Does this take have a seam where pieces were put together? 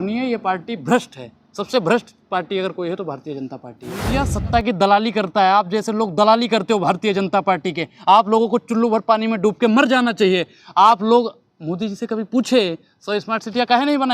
yes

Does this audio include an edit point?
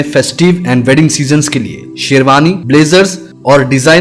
no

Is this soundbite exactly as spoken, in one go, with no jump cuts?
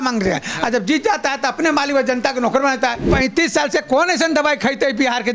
no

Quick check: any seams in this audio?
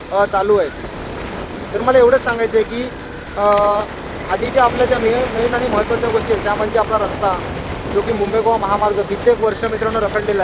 no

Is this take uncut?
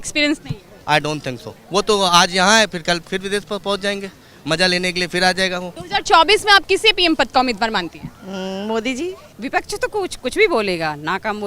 no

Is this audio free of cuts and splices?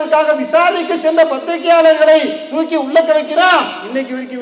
yes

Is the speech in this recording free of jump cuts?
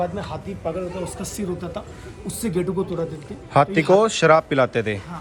yes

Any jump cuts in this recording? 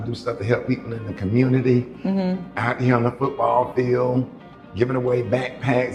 no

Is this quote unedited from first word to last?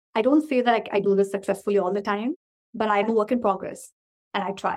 no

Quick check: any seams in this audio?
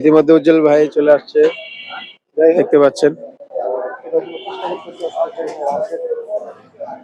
no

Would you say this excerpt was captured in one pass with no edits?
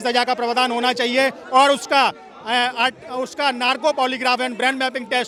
yes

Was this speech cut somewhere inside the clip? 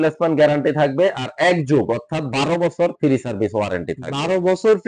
no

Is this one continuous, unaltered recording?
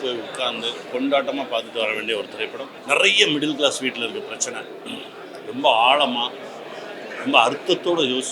no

